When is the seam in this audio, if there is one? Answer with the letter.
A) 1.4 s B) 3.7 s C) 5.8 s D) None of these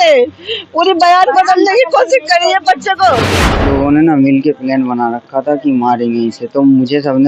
B